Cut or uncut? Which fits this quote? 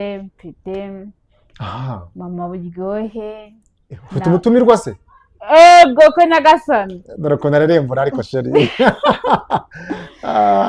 uncut